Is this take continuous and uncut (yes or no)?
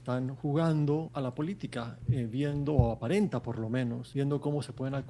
no